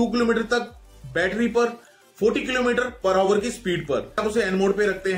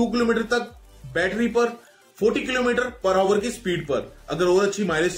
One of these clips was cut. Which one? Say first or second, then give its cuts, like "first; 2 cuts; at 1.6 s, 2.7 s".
first; 1 cut; at 4.2 s